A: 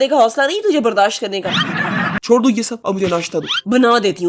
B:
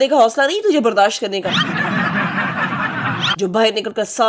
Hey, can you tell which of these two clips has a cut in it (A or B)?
A